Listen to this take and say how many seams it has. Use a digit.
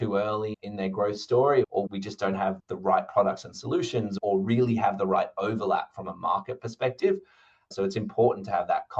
1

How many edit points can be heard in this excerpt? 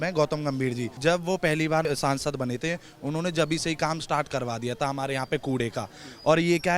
2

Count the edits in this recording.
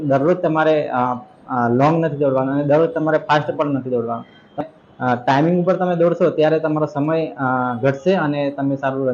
1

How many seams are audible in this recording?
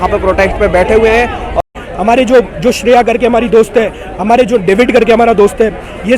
1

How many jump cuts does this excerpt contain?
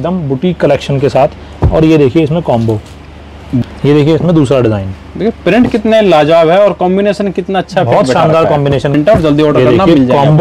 2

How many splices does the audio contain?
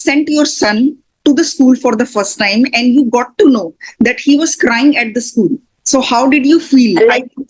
1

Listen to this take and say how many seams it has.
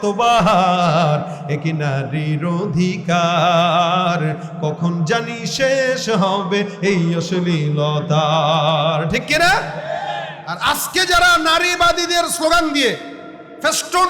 1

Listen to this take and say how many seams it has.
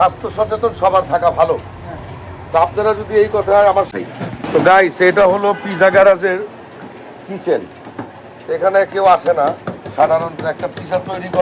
1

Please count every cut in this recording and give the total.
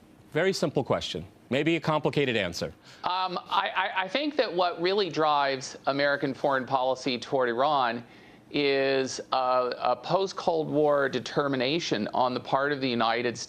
1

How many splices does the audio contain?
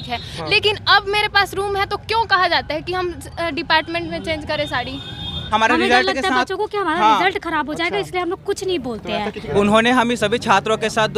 2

